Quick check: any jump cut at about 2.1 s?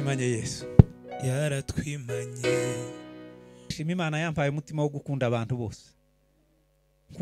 no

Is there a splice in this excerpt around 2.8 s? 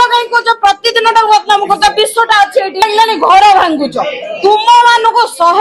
yes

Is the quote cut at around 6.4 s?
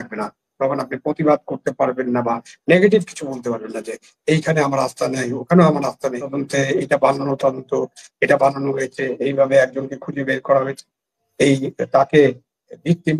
yes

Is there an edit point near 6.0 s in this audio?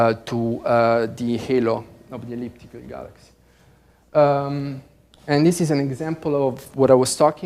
yes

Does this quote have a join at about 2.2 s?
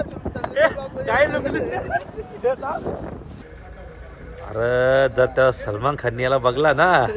no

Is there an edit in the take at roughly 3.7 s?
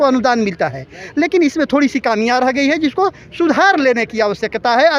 no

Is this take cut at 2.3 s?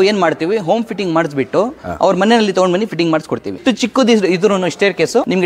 no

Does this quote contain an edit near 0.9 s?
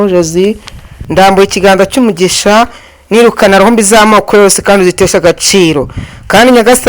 yes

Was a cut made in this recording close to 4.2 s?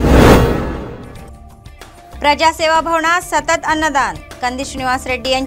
no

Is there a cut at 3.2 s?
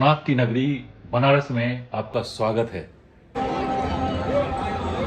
yes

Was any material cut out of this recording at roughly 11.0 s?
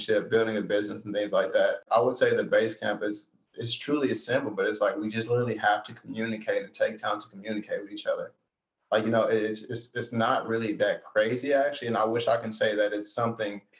no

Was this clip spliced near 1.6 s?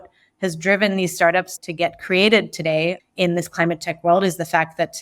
yes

